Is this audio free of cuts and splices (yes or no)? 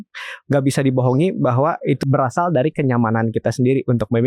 no